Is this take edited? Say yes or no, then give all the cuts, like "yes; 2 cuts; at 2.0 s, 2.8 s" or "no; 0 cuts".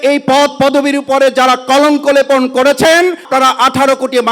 yes; 1 cut; at 3.2 s